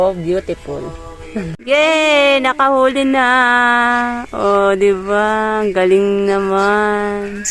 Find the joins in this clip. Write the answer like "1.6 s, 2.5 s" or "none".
1.5 s